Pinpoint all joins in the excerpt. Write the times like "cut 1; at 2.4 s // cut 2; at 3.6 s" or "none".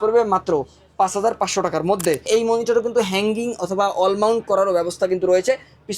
cut 1; at 2.3 s